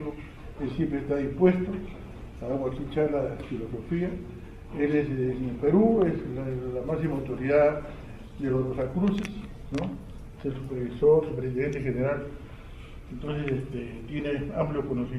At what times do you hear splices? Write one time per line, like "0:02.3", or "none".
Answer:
0:06.8